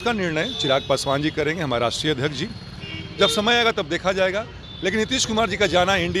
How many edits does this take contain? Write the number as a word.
zero